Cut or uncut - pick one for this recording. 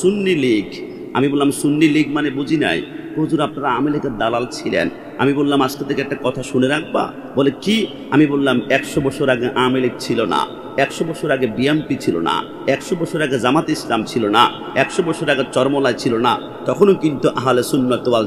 uncut